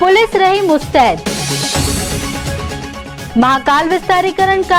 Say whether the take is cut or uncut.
uncut